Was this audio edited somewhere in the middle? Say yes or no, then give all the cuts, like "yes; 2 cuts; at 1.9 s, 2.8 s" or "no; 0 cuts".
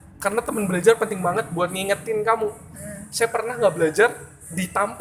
no; 0 cuts